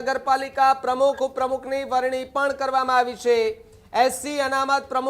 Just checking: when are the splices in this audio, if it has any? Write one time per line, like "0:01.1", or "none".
none